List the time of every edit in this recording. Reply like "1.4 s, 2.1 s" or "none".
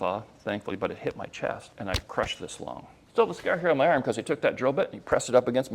1.7 s, 2.9 s